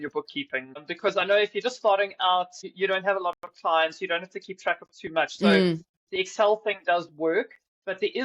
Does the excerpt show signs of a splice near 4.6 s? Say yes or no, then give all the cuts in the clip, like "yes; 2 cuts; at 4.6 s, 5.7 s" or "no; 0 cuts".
no; 2 cuts; at 0.8 s, 2.6 s